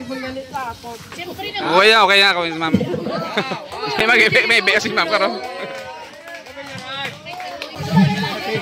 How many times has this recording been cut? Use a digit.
1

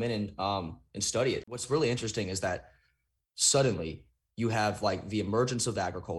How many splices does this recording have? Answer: 1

